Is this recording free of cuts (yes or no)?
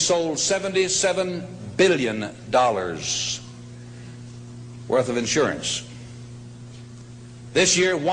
no